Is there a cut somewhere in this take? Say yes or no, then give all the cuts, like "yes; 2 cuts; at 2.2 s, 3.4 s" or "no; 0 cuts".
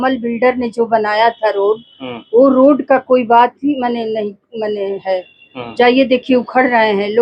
no; 0 cuts